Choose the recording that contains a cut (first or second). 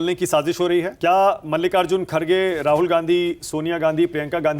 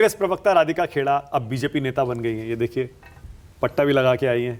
first